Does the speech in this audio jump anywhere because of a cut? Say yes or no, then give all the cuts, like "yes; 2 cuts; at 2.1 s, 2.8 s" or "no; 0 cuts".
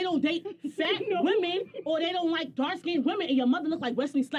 no; 0 cuts